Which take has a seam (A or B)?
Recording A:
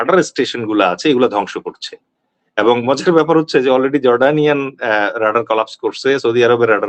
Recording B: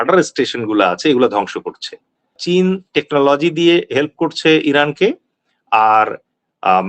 B